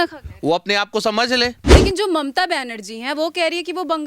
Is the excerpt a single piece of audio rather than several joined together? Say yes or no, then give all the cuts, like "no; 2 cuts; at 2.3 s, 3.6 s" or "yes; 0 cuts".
no; 1 cut; at 1.6 s